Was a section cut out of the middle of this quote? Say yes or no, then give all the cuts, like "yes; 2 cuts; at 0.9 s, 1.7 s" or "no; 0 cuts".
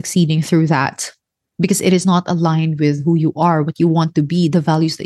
no; 0 cuts